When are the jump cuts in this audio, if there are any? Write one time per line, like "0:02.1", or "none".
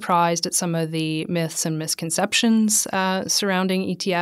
none